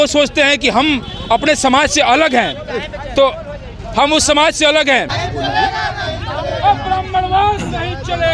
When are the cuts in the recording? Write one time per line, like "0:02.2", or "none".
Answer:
0:05.2